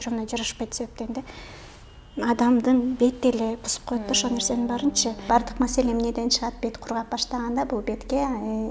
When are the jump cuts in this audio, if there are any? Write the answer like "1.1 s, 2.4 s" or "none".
5.3 s